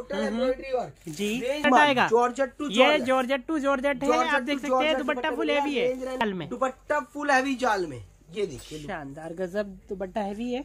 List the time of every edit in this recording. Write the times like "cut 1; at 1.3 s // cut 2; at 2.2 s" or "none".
cut 1; at 1.7 s // cut 2; at 6.2 s